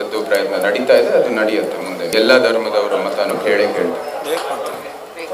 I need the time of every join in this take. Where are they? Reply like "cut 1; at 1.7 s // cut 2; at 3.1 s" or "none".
cut 1; at 2.1 s